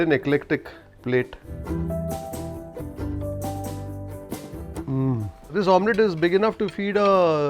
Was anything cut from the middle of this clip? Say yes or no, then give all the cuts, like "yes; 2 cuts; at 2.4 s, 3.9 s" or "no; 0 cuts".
yes; 3 cuts; at 2.8 s, 4.8 s, 5.5 s